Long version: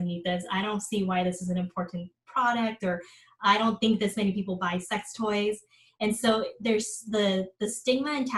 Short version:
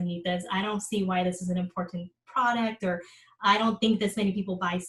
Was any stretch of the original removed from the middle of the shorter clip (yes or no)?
no